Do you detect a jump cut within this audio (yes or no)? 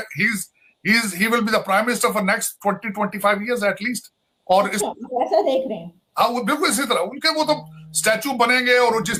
no